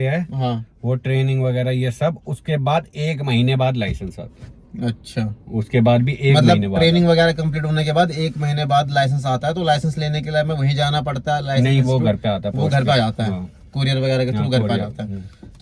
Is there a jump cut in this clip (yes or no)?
no